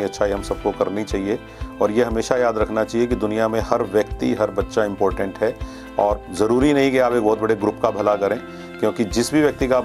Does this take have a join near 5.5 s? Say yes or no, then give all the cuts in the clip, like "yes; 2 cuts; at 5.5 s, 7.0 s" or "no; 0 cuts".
no; 0 cuts